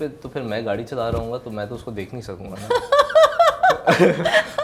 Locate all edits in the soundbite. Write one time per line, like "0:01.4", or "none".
none